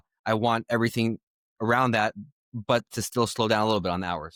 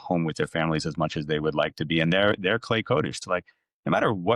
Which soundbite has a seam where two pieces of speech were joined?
second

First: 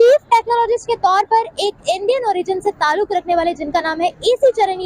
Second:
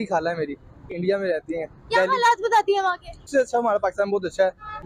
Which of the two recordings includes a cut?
second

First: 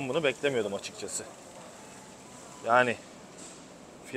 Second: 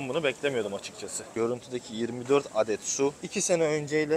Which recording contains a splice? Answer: second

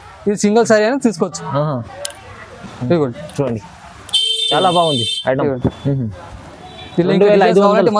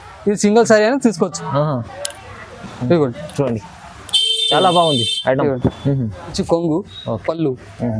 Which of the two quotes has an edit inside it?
second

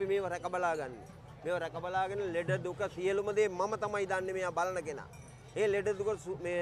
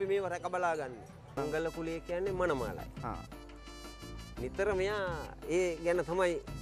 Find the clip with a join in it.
second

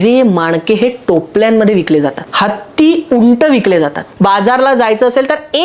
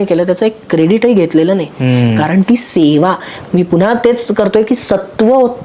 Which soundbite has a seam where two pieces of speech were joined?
first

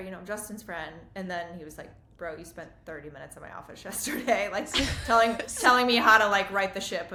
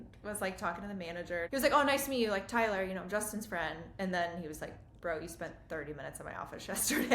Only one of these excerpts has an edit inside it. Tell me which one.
second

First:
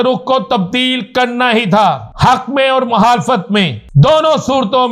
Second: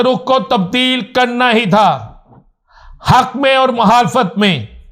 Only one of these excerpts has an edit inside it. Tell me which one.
first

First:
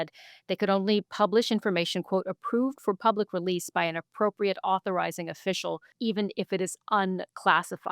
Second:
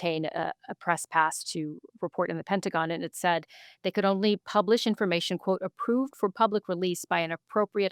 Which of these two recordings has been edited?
first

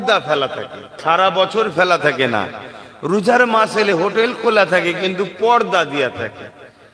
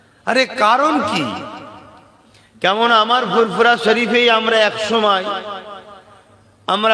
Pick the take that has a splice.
first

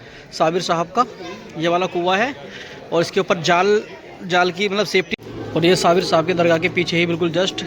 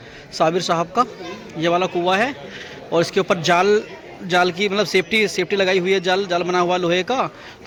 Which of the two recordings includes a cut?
first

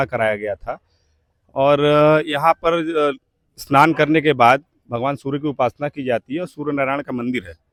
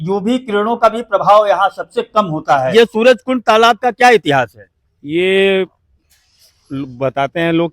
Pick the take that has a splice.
second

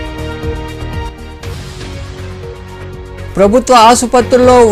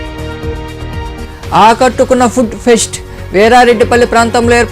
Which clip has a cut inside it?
second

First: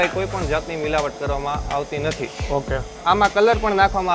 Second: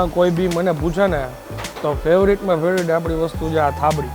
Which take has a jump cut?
first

